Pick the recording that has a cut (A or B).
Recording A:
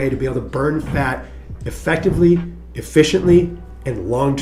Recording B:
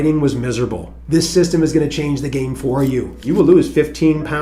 B